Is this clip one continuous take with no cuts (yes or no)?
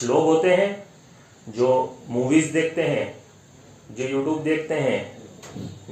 yes